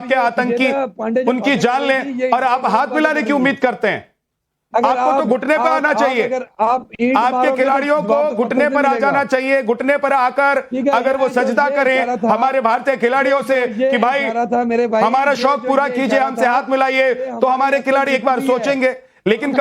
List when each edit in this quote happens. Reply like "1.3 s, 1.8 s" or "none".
none

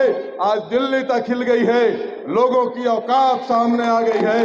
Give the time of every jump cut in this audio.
none

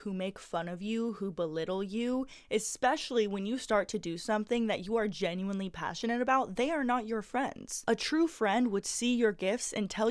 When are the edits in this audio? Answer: none

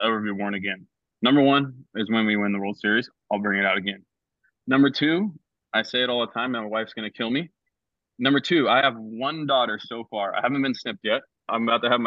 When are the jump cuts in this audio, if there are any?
none

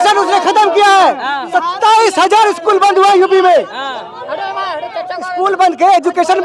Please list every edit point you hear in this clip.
none

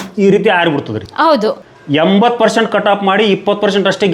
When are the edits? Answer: 1.6 s

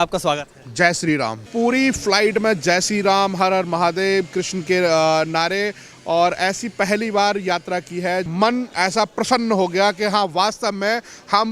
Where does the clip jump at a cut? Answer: 1.4 s, 8.3 s

